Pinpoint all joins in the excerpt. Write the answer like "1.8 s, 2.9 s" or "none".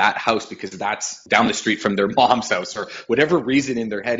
1.1 s